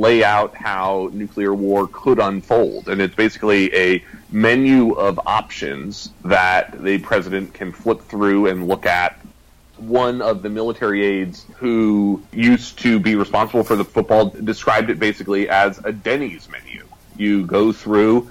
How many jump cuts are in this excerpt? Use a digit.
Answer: 3